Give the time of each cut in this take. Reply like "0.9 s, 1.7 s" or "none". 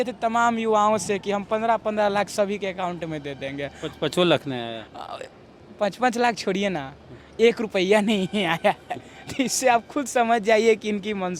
none